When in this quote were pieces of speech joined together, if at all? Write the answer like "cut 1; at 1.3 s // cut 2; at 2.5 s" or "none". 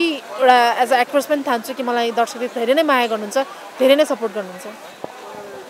none